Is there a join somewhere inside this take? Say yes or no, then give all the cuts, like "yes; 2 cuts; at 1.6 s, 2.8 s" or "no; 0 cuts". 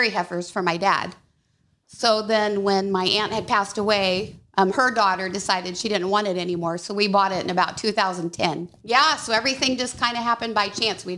yes; 1 cut; at 8.7 s